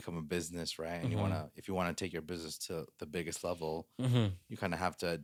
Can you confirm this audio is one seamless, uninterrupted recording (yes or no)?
yes